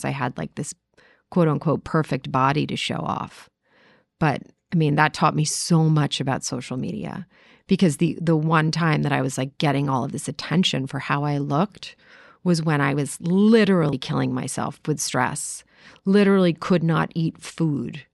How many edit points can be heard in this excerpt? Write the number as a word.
zero